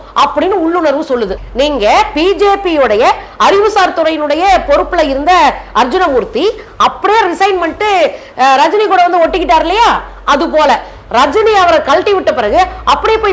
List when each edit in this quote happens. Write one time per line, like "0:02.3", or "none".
0:01.4

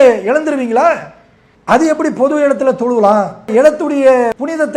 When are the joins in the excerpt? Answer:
0:01.5
0:03.5

